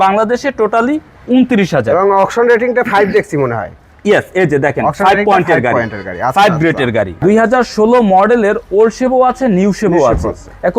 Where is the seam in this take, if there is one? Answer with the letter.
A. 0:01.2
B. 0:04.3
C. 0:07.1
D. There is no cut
C